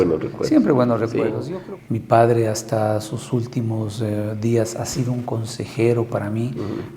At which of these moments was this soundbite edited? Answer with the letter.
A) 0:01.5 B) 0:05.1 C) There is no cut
A